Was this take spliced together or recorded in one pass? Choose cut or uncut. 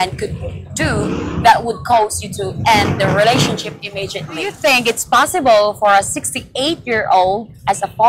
cut